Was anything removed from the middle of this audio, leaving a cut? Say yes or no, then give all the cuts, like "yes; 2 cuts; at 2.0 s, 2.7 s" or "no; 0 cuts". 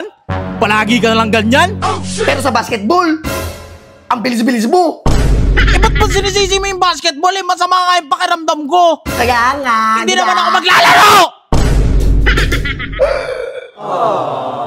no; 0 cuts